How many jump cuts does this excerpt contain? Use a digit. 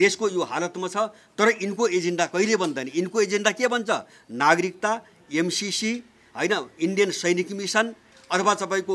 0